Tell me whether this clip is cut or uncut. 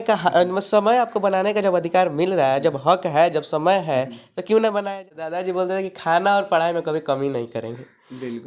cut